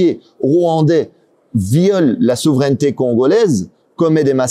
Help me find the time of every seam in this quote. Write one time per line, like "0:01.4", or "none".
none